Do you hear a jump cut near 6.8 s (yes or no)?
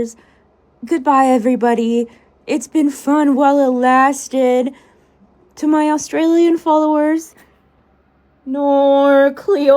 no